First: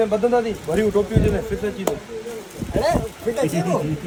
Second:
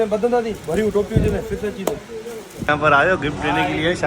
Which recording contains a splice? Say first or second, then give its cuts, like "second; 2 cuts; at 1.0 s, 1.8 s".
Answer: second; 1 cut; at 2.7 s